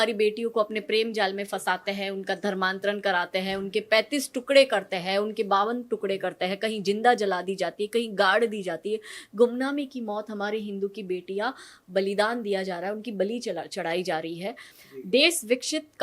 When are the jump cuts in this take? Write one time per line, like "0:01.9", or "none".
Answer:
0:14.7